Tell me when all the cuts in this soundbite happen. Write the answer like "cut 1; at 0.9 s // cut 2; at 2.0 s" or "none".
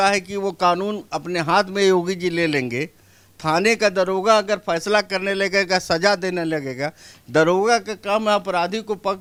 none